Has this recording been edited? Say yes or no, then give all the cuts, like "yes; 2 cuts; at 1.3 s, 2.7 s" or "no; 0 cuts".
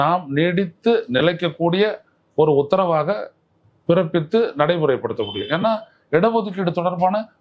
no; 0 cuts